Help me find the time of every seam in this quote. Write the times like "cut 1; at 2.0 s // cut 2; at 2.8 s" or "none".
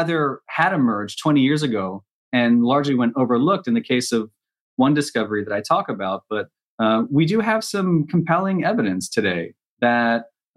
none